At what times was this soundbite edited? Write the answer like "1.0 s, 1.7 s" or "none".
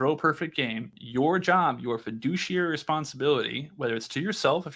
0.9 s